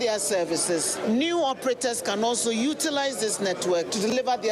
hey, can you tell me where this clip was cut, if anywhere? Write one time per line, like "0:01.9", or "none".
0:01.0